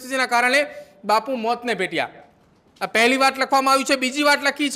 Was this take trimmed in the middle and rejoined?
no; 0 cuts

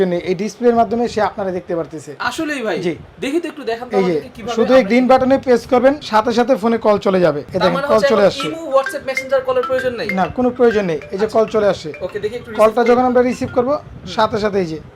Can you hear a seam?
yes; 2 cuts; at 6.0 s, 7.5 s

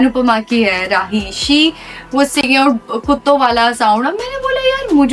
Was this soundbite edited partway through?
no; 0 cuts

